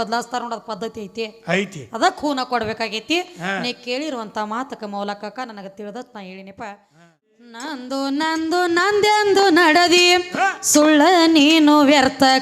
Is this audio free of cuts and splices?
no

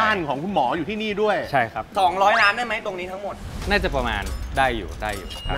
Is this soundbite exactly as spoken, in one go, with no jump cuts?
no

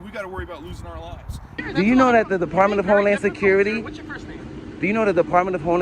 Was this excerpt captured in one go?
no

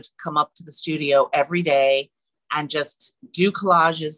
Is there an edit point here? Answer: no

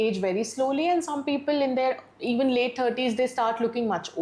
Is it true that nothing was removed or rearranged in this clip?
yes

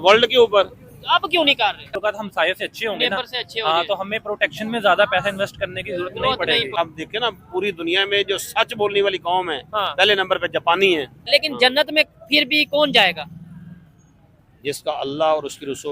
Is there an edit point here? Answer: yes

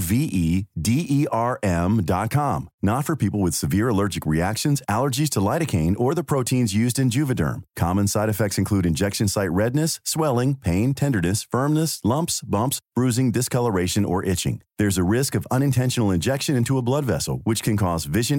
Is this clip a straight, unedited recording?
yes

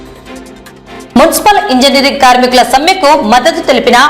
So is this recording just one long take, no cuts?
no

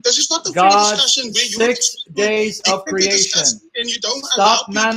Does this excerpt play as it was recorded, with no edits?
yes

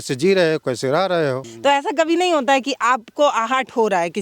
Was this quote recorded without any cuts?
no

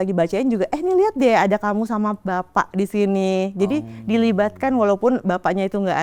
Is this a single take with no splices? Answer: yes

